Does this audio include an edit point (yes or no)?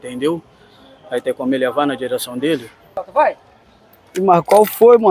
no